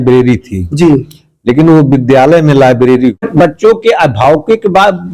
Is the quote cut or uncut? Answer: cut